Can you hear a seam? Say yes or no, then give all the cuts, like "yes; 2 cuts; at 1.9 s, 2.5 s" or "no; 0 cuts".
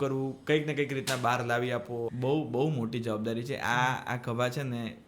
yes; 1 cut; at 2.1 s